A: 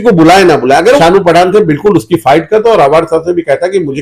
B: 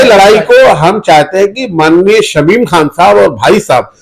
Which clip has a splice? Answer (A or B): A